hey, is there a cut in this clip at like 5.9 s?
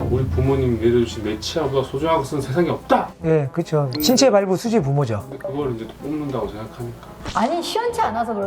no; 0 cuts

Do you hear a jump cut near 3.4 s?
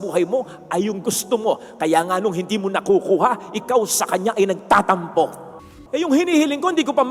no; 1 cut; at 5.6 s

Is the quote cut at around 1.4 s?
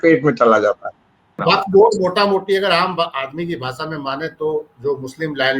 yes; 1 cut; at 1.4 s

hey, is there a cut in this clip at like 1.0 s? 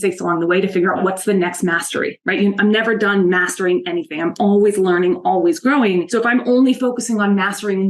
yes; 2 cuts; at 1.0 s, 6.1 s

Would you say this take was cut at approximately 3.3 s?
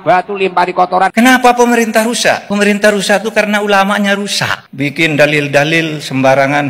no; 2 cuts; at 1.1 s, 4.6 s

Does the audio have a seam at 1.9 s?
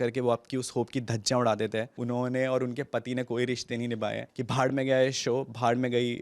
yes; 2 cuts; at 1.9 s, 4.3 s

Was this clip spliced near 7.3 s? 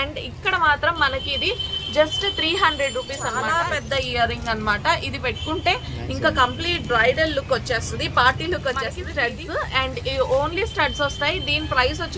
no; 2 cuts; at 3.4 s, 9.0 s

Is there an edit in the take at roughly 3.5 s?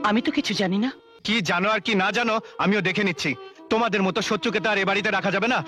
no; 1 cut; at 1.1 s

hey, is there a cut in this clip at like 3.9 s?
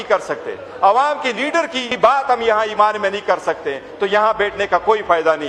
no; 1 cut; at 1.9 s

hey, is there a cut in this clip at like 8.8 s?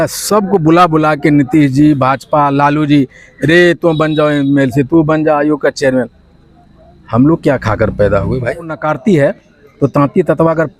yes; 1 cut; at 8.8 s

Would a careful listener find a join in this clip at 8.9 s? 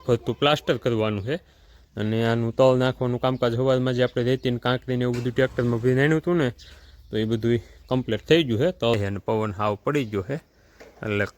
yes; 1 cut; at 8.9 s

